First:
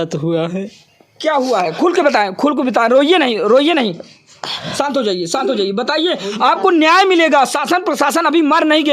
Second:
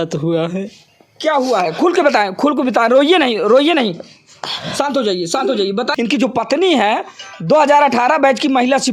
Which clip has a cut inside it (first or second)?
second